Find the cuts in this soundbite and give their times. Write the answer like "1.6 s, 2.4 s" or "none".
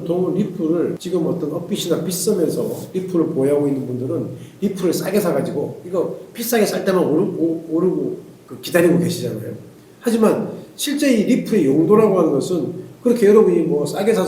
1.0 s